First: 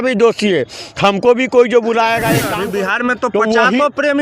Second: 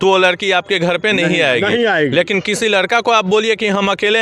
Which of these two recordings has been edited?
first; 1 cut; at 2.5 s

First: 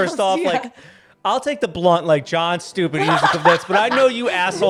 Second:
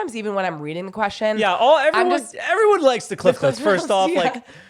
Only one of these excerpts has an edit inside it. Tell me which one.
second; 1 cut; at 2.4 s

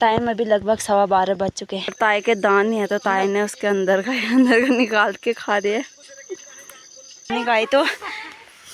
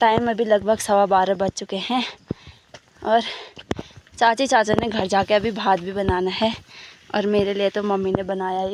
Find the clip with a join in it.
first; 2 cuts; at 1.9 s, 7.3 s

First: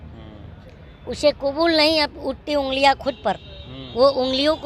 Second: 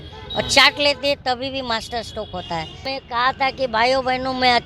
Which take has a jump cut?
second; 1 cut; at 2.9 s

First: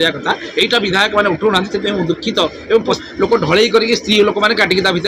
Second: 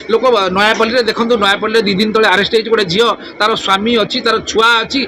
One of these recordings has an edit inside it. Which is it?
first; 1 cut; at 3.0 s

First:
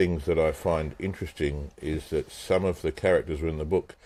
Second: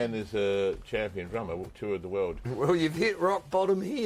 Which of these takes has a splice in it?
second; 1 cut; at 2.5 s

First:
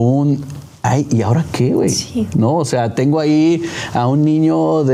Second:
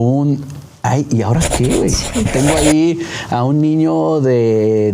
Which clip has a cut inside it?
second; 1 cut; at 2.3 s

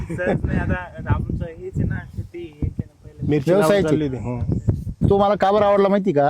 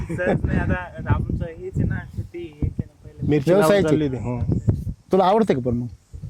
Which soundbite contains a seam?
first; 1 cut; at 5.0 s

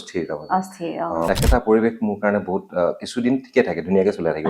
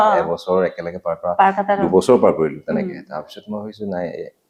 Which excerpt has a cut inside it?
first; 1 cut; at 1.3 s

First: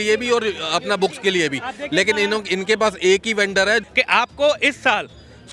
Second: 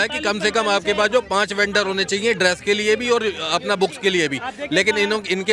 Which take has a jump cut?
first; 1 cut; at 3.8 s

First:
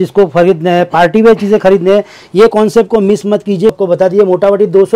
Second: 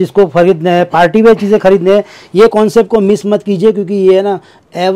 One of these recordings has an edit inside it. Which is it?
first; 1 cut; at 3.8 s

